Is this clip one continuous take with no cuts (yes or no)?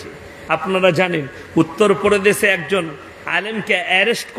yes